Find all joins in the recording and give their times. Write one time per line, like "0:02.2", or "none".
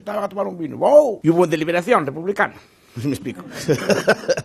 0:01.2